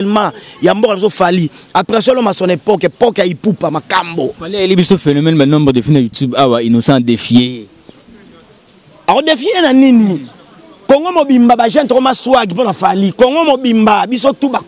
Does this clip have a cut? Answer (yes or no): no